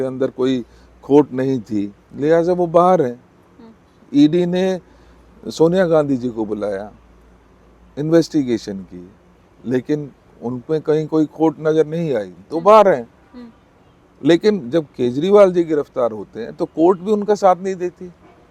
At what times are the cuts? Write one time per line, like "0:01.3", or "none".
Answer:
none